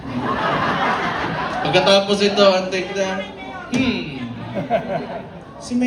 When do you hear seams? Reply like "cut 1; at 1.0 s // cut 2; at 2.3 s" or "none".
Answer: none